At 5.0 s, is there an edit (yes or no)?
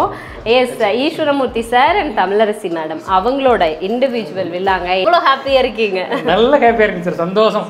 yes